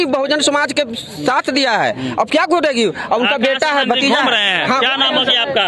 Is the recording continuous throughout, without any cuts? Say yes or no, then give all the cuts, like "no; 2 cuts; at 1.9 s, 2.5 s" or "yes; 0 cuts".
yes; 0 cuts